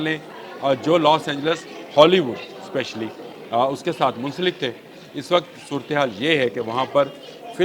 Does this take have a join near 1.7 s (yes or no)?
no